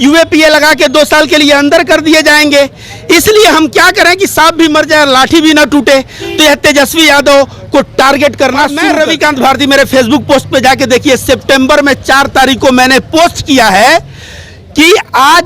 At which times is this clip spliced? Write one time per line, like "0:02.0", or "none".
0:08.9